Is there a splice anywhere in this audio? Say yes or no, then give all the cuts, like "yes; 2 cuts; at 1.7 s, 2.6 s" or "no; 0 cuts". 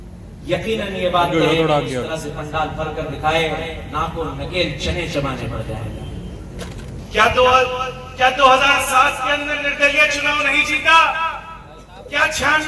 yes; 1 cut; at 7.0 s